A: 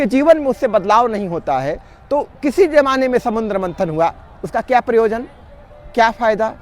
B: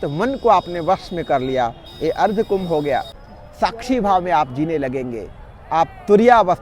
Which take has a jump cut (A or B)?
B